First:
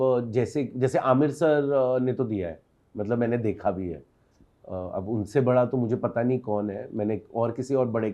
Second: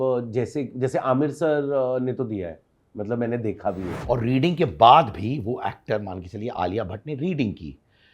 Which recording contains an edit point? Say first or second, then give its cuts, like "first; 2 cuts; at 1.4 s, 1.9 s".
second; 1 cut; at 3.9 s